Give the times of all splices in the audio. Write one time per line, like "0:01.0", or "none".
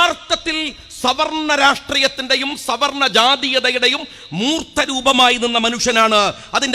none